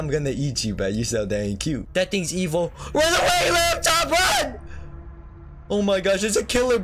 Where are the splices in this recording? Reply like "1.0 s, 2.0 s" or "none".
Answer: 1.8 s